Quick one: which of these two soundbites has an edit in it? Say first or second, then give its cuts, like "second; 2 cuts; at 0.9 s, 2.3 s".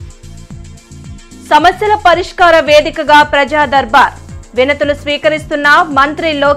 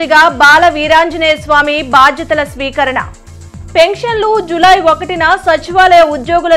first; 1 cut; at 1.2 s